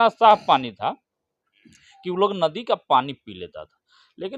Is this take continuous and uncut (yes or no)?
yes